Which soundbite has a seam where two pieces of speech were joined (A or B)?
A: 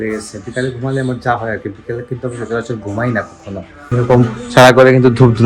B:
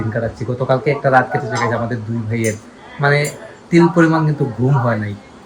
A